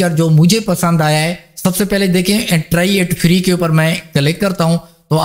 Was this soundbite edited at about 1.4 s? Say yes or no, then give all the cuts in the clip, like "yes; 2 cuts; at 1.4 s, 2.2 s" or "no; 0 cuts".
yes; 1 cut; at 1.4 s